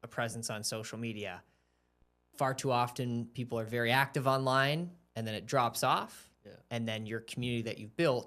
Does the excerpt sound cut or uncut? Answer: uncut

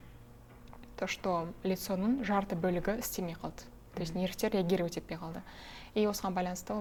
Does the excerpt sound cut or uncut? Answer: uncut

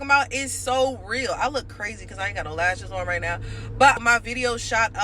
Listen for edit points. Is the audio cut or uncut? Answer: cut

